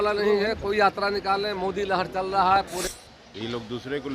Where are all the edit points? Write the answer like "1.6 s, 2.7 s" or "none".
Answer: 2.8 s

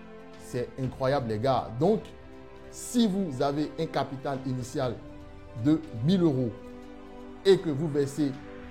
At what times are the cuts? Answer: none

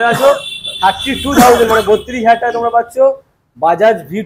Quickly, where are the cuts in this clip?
none

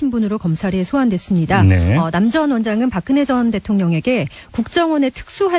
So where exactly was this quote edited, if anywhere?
1.1 s

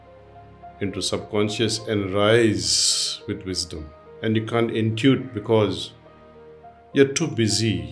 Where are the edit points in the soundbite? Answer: 4.1 s

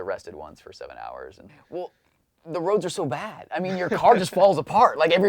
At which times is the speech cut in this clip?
1.5 s

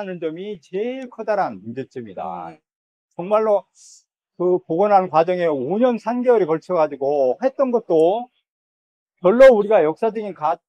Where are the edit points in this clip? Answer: none

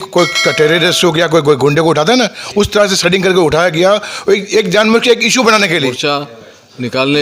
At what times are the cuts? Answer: 5.9 s

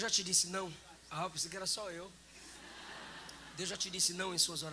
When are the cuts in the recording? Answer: 0.9 s

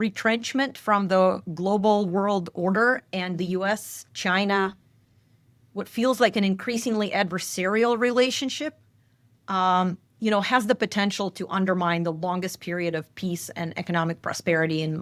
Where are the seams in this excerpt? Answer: none

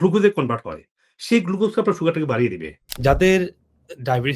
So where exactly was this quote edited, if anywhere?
2.9 s

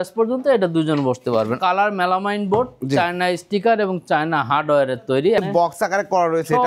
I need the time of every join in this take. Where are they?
1.6 s, 5.4 s

